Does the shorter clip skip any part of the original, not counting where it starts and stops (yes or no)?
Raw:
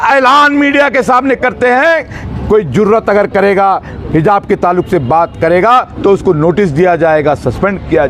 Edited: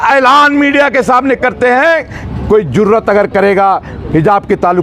no